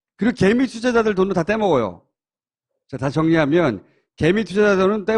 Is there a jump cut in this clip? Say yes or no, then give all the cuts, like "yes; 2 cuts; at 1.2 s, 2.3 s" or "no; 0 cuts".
yes; 1 cut; at 2.2 s